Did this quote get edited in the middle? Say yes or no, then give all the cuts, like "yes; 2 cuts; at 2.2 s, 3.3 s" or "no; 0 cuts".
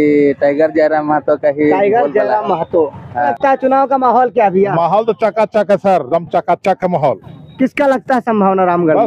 yes; 1 cut; at 3.1 s